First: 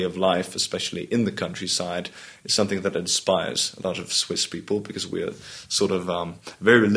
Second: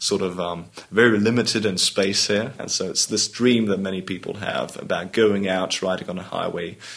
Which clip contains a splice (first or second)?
second